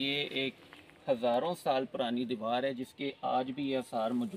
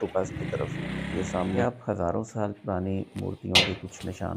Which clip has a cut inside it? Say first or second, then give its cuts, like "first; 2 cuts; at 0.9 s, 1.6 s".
second; 1 cut; at 1.6 s